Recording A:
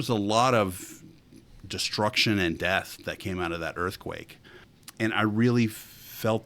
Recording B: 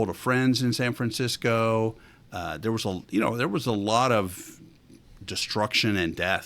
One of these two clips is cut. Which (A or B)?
A